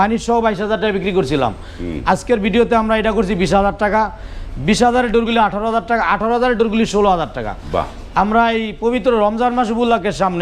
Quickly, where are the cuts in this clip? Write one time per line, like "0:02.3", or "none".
none